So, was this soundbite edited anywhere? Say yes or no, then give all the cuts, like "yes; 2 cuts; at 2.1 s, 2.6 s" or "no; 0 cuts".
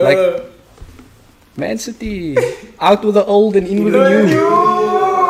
no; 0 cuts